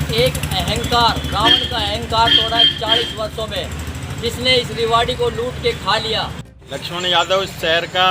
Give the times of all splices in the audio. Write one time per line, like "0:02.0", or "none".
0:06.6